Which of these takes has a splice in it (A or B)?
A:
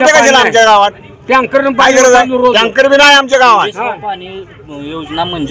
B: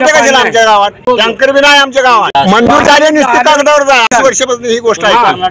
B